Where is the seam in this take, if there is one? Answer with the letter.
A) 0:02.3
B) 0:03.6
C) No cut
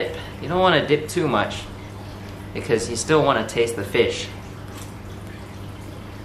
C